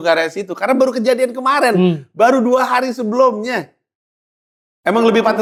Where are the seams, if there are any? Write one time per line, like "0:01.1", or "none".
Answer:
none